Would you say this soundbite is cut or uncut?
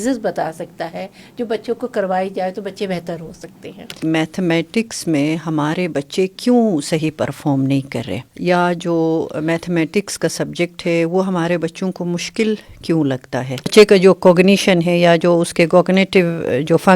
cut